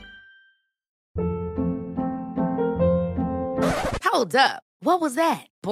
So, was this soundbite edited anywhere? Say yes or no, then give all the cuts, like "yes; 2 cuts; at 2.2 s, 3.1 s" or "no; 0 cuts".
yes; 1 cut; at 0.9 s